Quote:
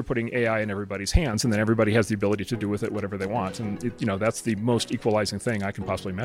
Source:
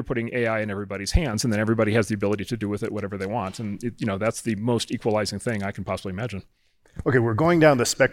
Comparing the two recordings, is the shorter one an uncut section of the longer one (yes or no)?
yes